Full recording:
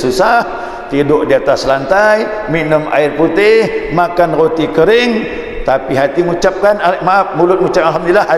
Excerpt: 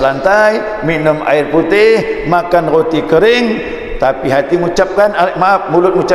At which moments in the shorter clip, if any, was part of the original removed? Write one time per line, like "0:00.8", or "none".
none